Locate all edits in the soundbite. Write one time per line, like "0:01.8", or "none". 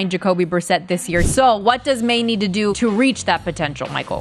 0:01.3
0:02.7